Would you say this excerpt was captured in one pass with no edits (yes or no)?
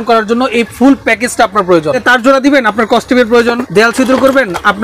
no